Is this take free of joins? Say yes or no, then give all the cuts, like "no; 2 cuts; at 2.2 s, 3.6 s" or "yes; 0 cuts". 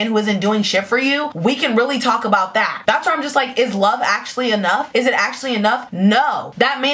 yes; 0 cuts